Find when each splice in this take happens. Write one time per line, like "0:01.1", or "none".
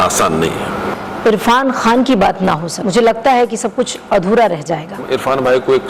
0:00.9
0:02.7
0:05.0